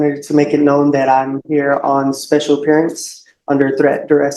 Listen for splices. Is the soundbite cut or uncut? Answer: uncut